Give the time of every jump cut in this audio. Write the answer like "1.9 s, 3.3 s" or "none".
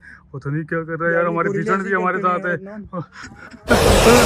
3.2 s

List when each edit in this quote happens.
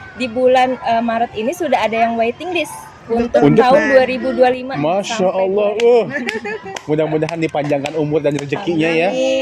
none

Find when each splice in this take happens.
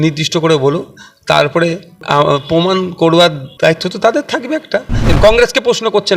3.4 s, 5.1 s

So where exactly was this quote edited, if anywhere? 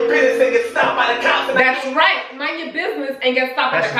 none

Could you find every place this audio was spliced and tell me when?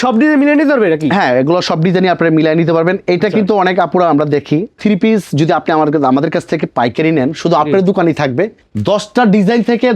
4.8 s, 8.6 s

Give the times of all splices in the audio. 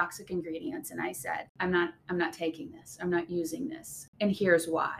1.5 s, 4.0 s

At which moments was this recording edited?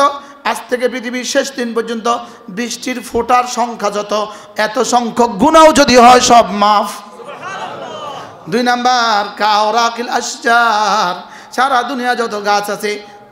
none

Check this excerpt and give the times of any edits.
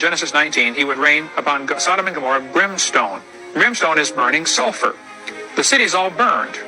none

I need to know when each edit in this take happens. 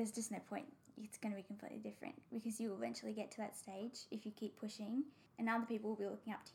5.2 s

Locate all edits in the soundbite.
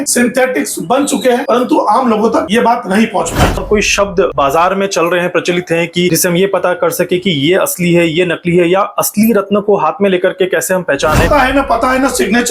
3.6 s, 11.3 s

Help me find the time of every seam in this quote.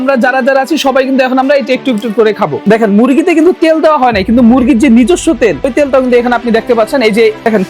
2.6 s, 5.7 s

